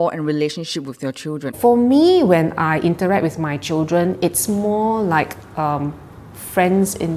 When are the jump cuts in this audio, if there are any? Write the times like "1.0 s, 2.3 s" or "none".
1.5 s